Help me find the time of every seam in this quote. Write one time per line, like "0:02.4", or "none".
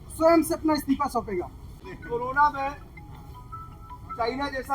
0:01.6

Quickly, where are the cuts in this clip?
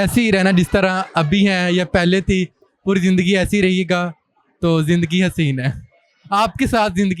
none

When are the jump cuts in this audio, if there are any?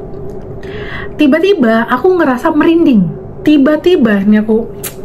0:03.2

